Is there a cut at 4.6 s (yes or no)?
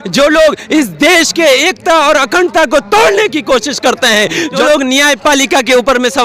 yes